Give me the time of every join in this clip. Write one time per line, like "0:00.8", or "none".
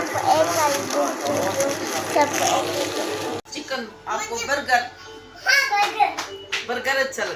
0:03.5